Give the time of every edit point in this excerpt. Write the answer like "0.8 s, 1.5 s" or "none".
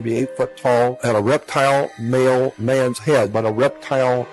1.0 s, 3.3 s